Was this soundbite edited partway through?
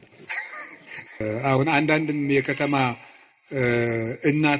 yes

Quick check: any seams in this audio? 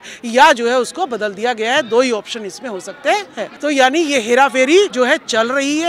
yes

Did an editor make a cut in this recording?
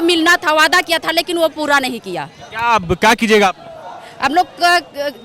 no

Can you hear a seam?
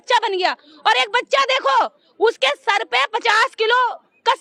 no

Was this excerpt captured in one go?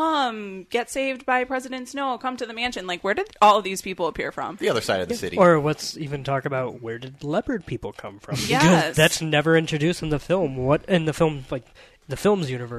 yes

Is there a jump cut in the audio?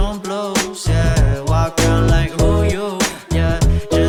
no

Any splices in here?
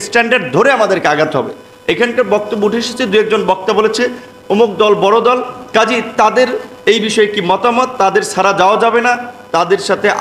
no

